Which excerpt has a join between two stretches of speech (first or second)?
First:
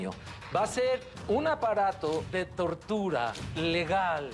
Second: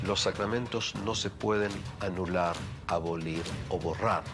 first